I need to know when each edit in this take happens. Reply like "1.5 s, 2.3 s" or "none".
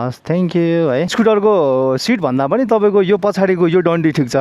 1.1 s